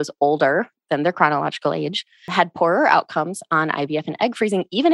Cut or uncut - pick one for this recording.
cut